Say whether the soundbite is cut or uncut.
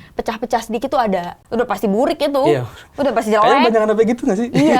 cut